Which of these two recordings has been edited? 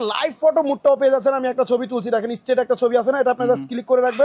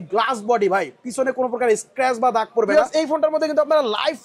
second; 1 cut; at 2.7 s

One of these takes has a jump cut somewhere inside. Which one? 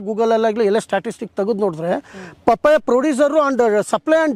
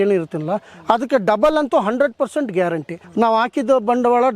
second; 1 cut; at 3.0 s

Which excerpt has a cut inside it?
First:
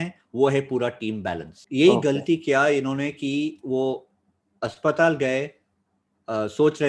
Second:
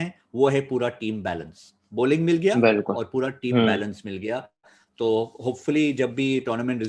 first; 1 cut; at 1.5 s

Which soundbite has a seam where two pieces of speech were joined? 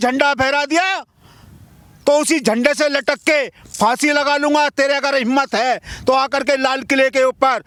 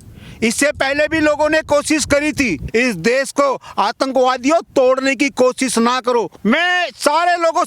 second; 2 cuts; at 2.6 s, 6.3 s

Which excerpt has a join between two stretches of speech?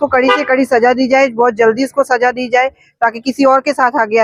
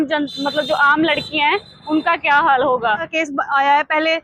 second; 1 cut; at 3.1 s

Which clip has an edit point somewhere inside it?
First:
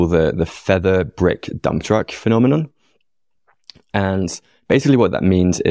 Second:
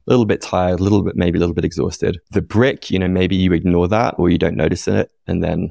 second; 1 cut; at 2.2 s

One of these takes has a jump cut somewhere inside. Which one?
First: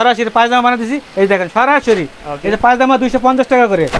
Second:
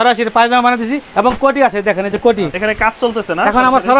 second; 2 cuts; at 1.1 s, 2.5 s

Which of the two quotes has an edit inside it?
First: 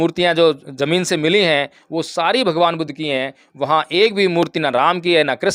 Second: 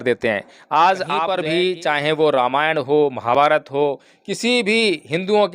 second; 1 cut; at 1.2 s

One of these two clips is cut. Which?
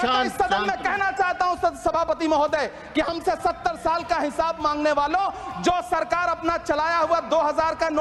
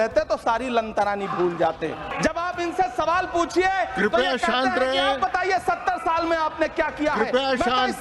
second; 1 cut; at 2.1 s

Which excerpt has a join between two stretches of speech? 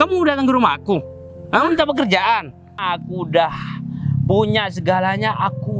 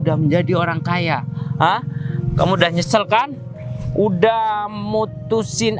first; 1 cut; at 2.7 s

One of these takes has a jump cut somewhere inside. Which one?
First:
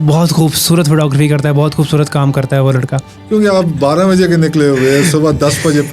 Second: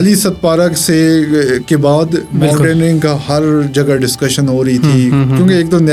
first; 1 cut; at 3.1 s

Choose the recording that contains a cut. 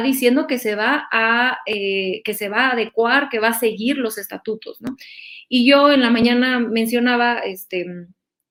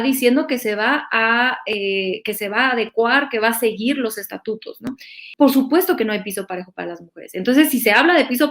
second; 1 cut; at 5.2 s

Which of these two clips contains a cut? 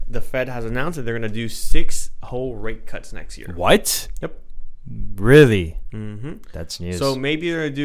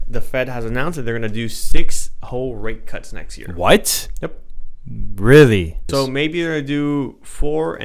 second; 1 cut; at 5.8 s

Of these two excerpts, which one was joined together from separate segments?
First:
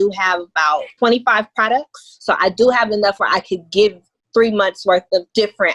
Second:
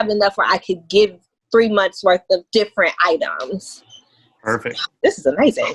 first; 1 cut; at 0.9 s

